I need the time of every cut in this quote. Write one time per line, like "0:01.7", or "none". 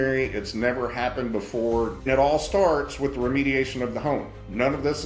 0:02.0